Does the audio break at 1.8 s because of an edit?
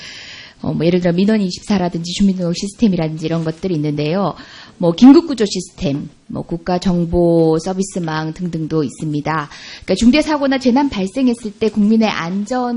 no; 1 cut; at 7.5 s

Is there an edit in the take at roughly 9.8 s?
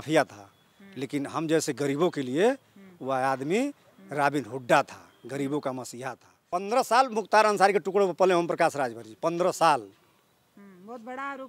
no; 1 cut; at 6.5 s

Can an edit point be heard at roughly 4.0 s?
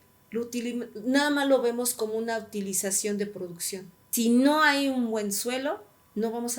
yes; 1 cut; at 4.0 s

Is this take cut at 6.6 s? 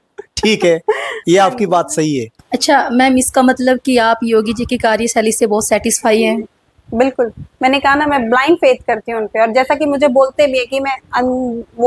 no; 1 cut; at 2.3 s

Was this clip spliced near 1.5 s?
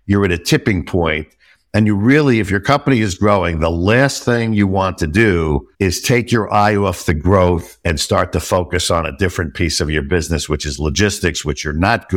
no; 0 cuts

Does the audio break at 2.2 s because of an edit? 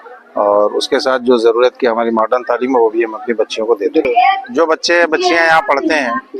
no; 1 cut; at 4.0 s

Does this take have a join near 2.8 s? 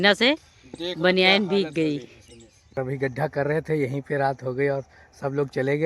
yes; 1 cut; at 2.8 s

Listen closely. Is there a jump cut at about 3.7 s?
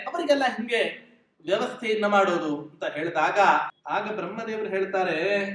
yes; 1 cut; at 3.7 s

